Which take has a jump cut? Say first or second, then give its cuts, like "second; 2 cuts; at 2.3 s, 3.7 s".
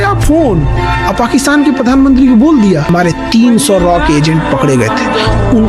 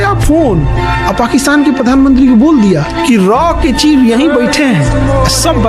first; 1 cut; at 2.9 s